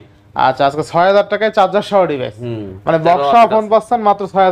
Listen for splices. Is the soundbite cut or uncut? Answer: uncut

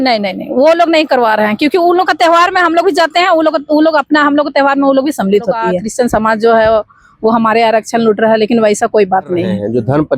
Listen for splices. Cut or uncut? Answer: cut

